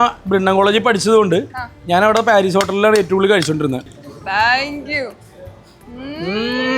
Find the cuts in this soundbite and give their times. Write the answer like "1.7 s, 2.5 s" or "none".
3.9 s